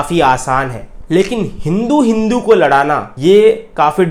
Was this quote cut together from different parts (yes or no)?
no